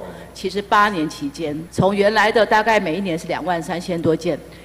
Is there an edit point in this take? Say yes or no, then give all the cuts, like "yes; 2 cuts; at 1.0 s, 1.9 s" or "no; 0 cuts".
yes; 1 cut; at 1.6 s